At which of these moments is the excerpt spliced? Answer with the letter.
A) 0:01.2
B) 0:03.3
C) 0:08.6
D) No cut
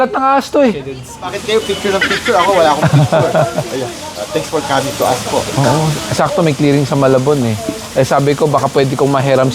A